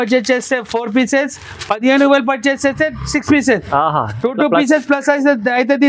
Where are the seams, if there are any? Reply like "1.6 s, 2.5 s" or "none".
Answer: none